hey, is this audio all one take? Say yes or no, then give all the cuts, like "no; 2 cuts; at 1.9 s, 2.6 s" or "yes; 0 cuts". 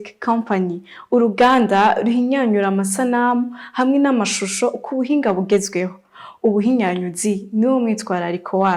yes; 0 cuts